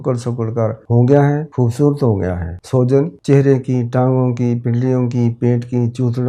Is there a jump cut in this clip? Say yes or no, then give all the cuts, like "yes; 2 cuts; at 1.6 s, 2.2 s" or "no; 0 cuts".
yes; 4 cuts; at 0.8 s, 1.5 s, 2.5 s, 3.2 s